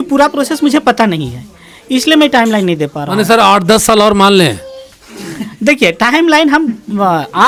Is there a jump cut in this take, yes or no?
no